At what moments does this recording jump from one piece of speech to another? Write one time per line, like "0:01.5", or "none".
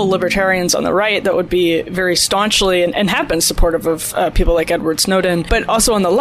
none